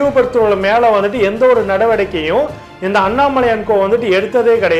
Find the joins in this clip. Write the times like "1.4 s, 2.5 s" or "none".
none